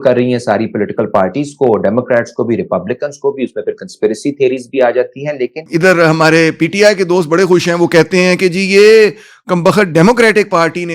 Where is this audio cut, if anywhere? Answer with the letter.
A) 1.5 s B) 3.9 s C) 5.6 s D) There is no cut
C